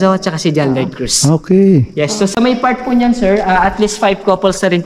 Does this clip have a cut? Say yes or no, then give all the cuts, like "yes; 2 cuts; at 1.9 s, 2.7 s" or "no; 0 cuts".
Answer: no; 0 cuts